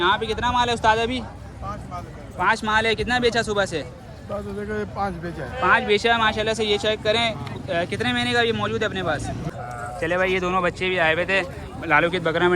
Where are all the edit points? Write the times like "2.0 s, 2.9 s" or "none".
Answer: 9.5 s